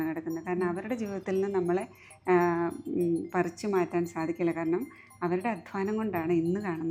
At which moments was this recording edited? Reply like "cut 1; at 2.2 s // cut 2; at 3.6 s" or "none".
none